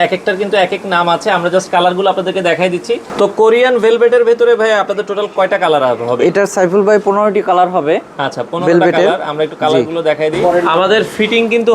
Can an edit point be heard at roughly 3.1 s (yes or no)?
yes